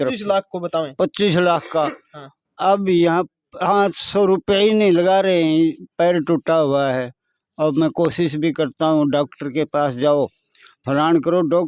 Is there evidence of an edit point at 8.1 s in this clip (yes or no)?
no